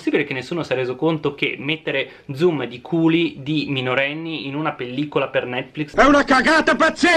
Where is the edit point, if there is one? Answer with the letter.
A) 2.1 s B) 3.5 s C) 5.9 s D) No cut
C